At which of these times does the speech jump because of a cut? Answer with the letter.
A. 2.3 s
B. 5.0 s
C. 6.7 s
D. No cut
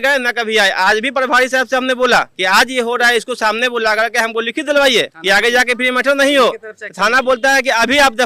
D